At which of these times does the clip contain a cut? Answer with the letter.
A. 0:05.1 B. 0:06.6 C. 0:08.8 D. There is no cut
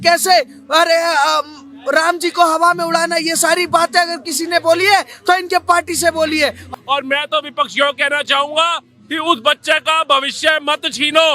B